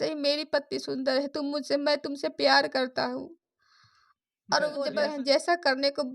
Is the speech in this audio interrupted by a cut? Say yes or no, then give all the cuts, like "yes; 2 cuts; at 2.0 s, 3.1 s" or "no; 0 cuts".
yes; 1 cut; at 4.9 s